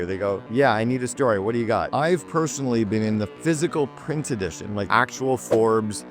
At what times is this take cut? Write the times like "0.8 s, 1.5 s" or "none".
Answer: 1.9 s, 4.9 s